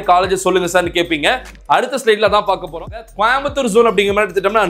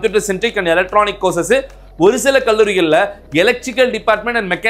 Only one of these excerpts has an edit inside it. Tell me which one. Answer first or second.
first